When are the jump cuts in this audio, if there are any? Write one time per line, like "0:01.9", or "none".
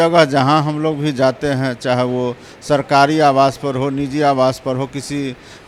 none